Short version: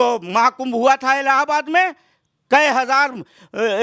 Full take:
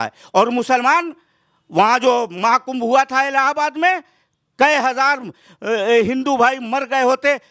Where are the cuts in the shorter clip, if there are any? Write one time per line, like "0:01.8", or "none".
none

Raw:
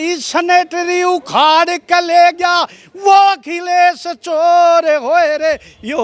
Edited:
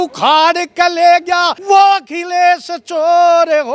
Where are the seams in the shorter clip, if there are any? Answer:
0:01.5

